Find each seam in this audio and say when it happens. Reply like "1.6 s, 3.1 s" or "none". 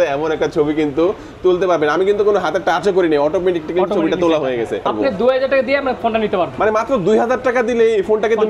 4.9 s